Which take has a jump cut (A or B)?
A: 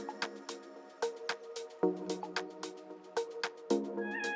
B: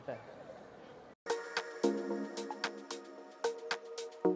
B